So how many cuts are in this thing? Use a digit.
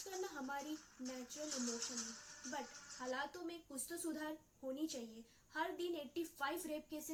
0